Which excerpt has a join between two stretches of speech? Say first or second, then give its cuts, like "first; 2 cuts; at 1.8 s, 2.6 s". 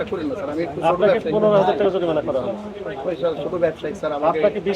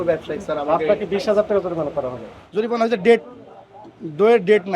second; 1 cut; at 2.4 s